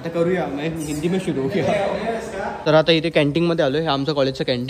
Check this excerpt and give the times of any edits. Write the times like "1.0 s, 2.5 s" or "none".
2.5 s